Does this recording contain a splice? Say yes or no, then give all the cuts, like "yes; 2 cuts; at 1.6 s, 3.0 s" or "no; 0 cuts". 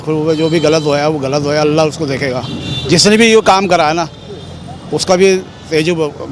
no; 0 cuts